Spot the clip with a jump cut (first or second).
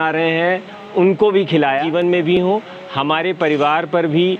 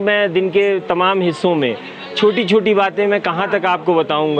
first